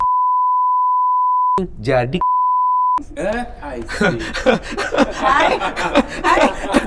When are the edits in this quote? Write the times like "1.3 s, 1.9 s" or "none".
none